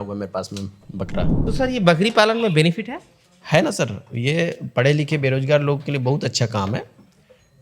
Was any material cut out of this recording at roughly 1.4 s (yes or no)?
yes